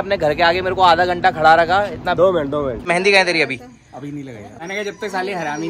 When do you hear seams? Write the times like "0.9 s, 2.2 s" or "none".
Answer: 2.9 s, 4.4 s